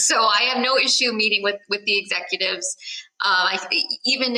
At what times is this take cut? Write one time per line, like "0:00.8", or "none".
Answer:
none